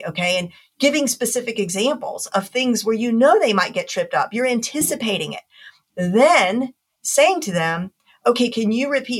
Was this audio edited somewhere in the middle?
yes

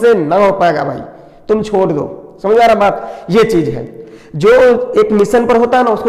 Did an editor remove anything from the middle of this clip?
no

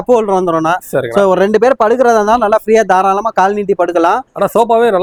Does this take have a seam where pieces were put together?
no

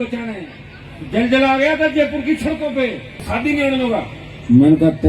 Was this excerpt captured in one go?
no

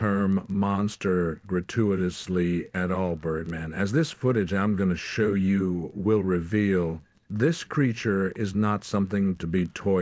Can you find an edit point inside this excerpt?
no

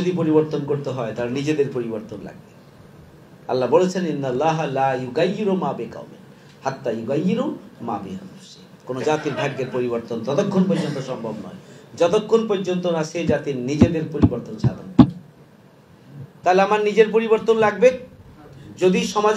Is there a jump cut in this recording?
no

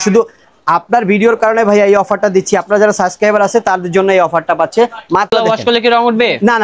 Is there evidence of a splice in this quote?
yes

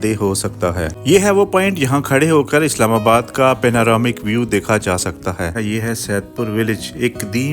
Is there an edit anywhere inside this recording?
yes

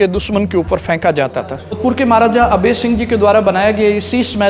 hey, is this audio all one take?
no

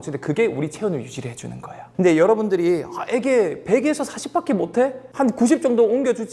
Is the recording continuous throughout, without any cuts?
yes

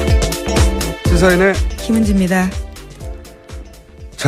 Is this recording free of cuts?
no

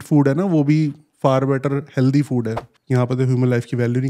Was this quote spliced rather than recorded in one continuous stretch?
yes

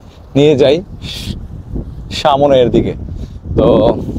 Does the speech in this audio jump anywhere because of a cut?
no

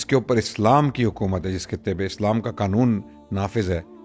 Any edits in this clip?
no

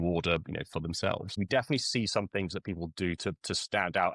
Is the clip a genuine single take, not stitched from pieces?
no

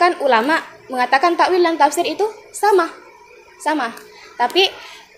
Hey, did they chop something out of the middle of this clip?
no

